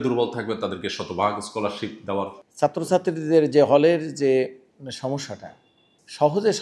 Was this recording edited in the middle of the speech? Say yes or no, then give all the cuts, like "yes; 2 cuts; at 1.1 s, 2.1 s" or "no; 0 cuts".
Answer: yes; 1 cut; at 2.4 s